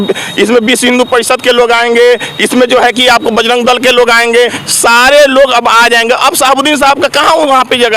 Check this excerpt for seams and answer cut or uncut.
cut